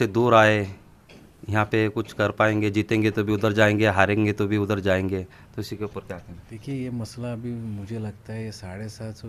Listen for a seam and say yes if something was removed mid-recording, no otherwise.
no